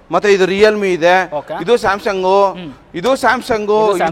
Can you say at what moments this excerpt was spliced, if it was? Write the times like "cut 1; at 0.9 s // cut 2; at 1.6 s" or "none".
none